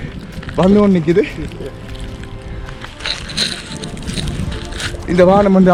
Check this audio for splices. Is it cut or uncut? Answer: uncut